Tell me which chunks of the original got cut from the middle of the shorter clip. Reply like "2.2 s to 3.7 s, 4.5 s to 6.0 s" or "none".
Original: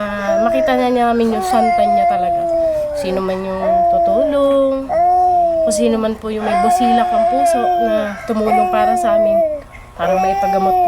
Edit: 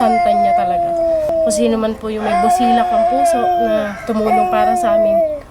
2.8 s to 5.5 s